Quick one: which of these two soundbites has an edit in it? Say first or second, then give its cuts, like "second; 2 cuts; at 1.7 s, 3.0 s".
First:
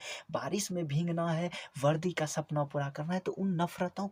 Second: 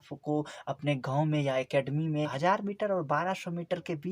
second; 1 cut; at 2.3 s